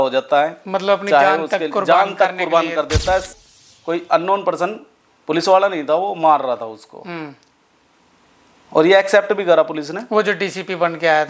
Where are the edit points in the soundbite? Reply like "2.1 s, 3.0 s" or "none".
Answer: 3.3 s